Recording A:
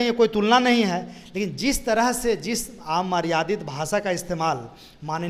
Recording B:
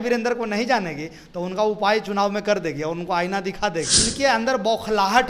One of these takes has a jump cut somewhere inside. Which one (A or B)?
B